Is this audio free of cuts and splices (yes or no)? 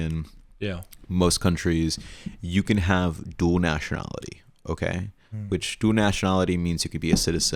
yes